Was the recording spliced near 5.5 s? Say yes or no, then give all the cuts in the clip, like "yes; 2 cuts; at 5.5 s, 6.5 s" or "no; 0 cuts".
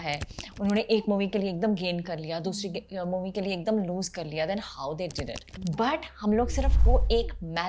yes; 1 cut; at 5.5 s